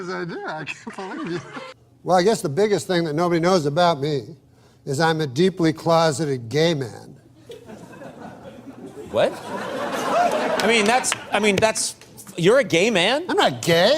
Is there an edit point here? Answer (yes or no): yes